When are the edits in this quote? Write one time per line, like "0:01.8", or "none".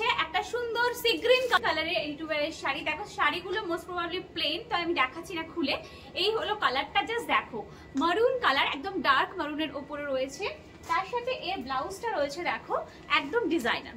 0:01.6